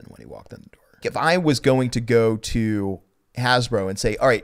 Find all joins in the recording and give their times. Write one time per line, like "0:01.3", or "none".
0:01.0